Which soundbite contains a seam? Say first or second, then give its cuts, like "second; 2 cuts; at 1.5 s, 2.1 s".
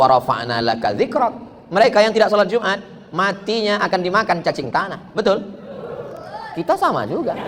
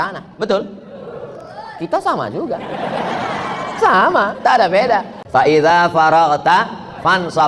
second; 1 cut; at 5.2 s